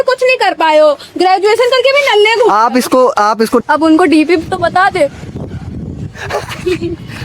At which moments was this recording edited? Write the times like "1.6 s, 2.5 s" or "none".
3.6 s